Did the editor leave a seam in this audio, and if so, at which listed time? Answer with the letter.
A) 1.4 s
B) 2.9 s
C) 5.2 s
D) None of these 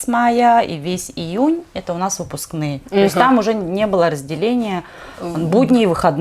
D